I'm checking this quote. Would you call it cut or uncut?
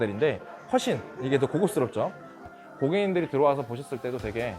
cut